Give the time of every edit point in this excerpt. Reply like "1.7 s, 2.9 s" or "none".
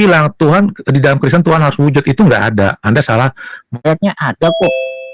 3.8 s